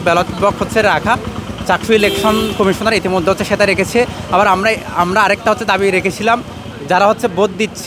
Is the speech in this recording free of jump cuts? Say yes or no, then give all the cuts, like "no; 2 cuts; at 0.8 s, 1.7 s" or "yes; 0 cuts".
yes; 0 cuts